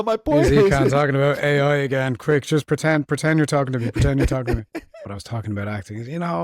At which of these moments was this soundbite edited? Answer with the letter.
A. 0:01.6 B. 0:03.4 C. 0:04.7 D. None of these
C